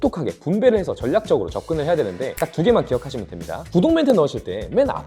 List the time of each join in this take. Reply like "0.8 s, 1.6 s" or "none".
3.7 s